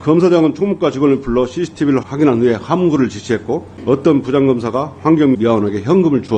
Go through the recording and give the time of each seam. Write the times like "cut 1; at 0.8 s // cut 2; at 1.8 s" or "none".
cut 1; at 2.0 s // cut 2; at 3.7 s // cut 3; at 5.4 s